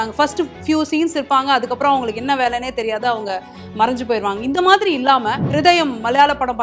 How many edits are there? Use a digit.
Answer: 1